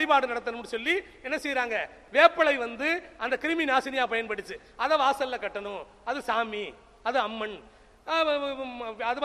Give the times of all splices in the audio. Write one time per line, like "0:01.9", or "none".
0:01.9

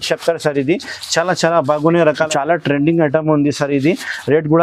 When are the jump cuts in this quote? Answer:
0:02.3

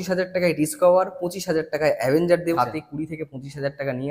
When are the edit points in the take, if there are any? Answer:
0:02.6

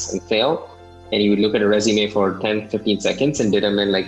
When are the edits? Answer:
none

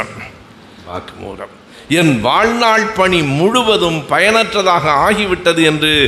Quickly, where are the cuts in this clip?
0:00.9

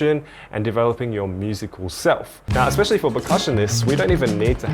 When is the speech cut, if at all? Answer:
0:02.4

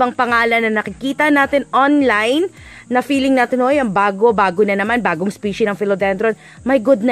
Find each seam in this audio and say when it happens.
none

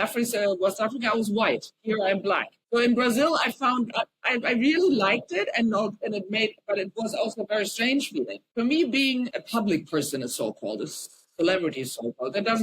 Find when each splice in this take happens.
0:02.5
0:04.2
0:08.4
0:09.3

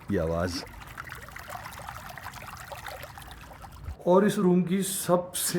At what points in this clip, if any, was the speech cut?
0:01.8
0:03.9

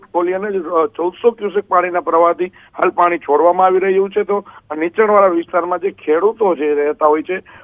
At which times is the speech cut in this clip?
none

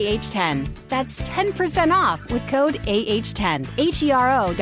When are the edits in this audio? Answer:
0:03.7

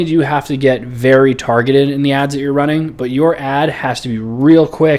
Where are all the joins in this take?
none

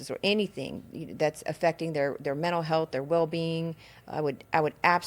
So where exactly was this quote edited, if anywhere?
none

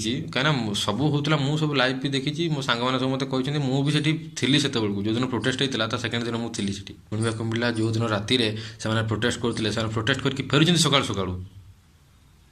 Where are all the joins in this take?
0:07.1

